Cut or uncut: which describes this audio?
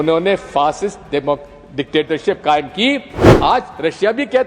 cut